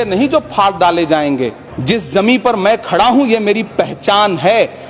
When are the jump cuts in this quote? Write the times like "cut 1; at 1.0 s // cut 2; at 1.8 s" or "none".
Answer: cut 1; at 1.7 s